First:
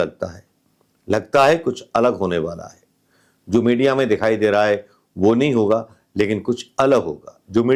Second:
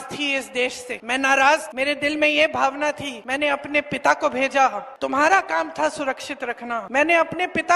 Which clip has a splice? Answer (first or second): second